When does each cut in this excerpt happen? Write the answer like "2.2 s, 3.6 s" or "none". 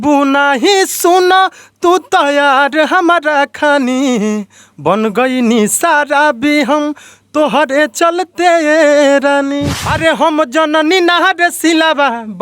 9.8 s